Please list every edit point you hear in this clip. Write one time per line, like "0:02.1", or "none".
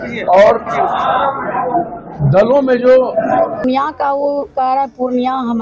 0:03.6